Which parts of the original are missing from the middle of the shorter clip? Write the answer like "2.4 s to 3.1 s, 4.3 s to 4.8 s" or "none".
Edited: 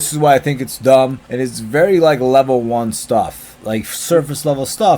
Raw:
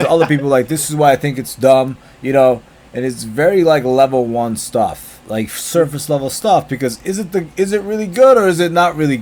2.0 s to 2.9 s